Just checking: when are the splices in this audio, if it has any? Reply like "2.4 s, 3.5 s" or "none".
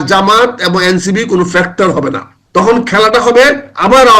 2.7 s